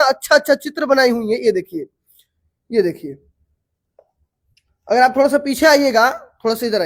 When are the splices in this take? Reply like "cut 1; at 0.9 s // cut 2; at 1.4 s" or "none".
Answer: none

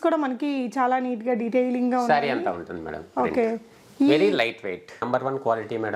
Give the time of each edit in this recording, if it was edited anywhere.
cut 1; at 5.0 s

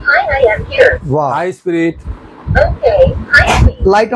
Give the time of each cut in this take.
none

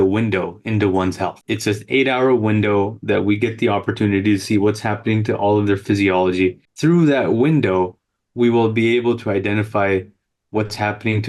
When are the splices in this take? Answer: cut 1; at 1.4 s // cut 2; at 6.7 s

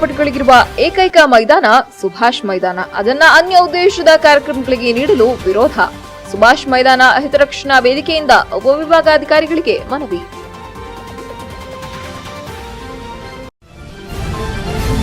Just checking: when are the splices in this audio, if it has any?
cut 1; at 13.5 s

